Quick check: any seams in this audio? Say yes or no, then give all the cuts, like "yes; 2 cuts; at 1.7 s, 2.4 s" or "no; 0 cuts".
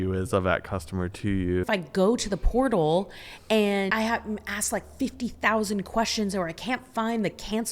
yes; 2 cuts; at 1.7 s, 3.9 s